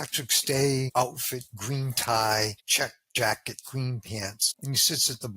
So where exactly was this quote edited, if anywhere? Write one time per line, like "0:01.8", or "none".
0:00.9
0:02.6
0:04.5

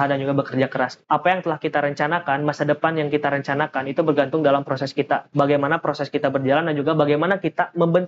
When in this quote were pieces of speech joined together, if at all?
0:01.0
0:05.3

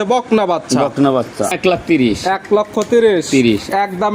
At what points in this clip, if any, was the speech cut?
0:01.5

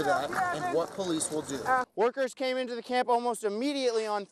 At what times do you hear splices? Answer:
0:01.9

